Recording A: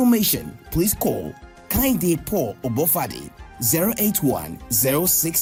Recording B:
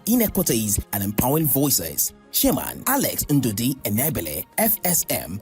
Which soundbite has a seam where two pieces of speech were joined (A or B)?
B